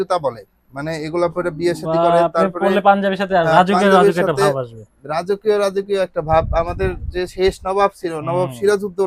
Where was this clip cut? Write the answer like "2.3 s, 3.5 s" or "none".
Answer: none